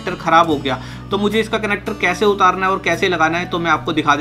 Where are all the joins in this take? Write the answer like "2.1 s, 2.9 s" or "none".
none